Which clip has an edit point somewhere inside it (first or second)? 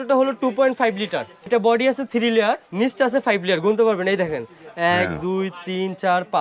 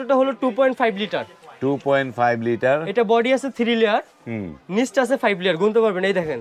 first